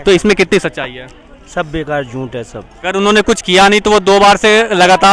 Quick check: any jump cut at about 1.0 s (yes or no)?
no